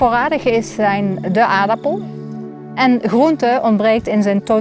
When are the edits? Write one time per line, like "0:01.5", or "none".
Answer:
0:02.2